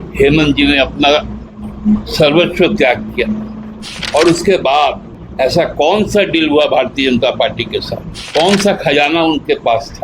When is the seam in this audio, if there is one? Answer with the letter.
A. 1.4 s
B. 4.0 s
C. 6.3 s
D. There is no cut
B